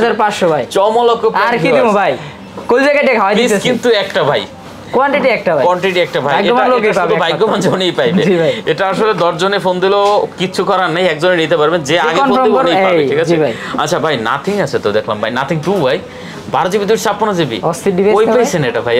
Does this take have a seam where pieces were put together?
no; 0 cuts

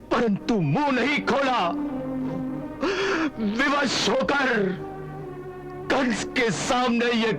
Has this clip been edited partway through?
yes; 1 cut; at 2.7 s

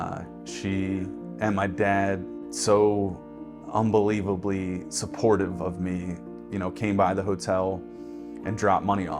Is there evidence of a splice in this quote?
yes; 1 cut; at 2.5 s

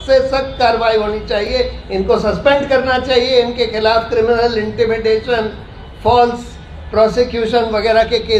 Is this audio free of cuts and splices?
yes; 0 cuts

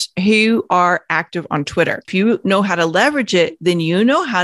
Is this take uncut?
no; 1 cut; at 2.1 s

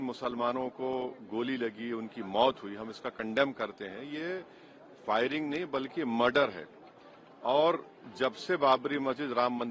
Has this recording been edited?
no; 0 cuts

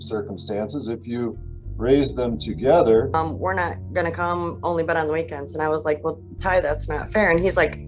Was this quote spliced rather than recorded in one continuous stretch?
yes; 1 cut; at 3.1 s

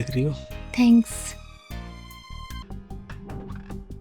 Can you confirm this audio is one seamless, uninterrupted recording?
no; 1 cut; at 2.6 s

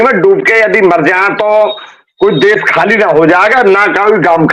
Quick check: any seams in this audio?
no; 0 cuts

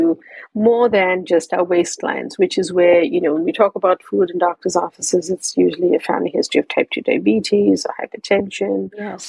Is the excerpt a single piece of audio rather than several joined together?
yes; 0 cuts

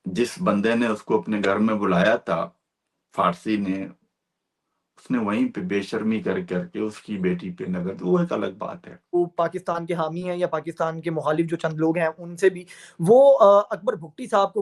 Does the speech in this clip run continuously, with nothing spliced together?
no; 1 cut; at 9.1 s

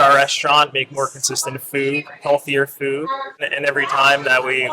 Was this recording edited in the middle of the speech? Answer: yes; 1 cut; at 3.4 s

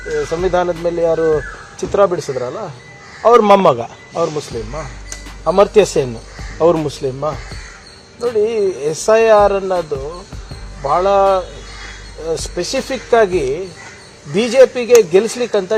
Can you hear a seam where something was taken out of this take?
no; 0 cuts

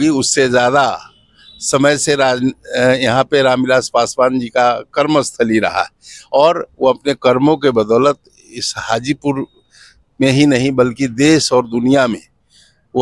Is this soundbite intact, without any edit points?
yes; 0 cuts

